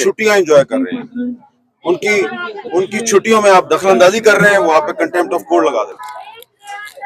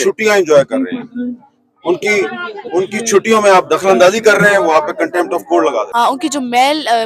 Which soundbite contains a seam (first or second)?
second